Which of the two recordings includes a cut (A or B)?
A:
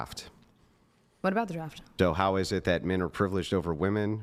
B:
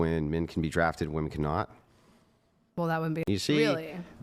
B